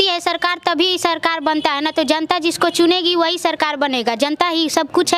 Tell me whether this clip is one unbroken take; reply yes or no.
yes